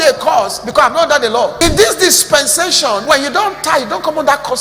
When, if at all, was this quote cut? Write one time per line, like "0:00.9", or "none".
0:01.5
0:03.0